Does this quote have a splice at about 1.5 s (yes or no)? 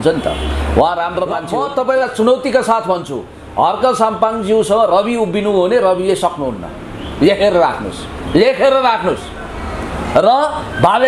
yes